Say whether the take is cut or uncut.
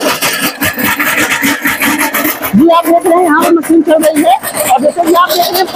uncut